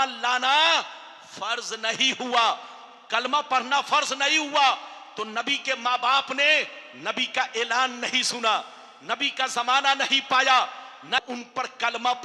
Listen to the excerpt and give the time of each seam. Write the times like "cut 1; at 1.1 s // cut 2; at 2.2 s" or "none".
cut 1; at 11.2 s